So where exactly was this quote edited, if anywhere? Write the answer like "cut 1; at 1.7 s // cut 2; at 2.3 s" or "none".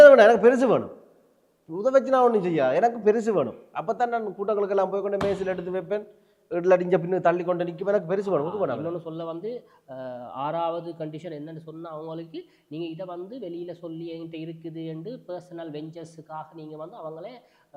none